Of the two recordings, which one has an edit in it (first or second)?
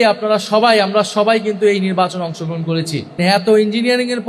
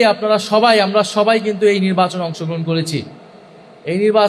first